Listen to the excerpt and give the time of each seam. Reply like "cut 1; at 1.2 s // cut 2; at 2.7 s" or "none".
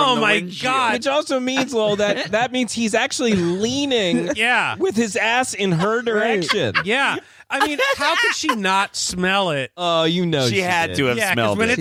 none